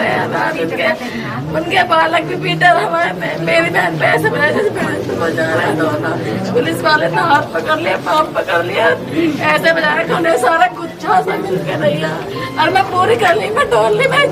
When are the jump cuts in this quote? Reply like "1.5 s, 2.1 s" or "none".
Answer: none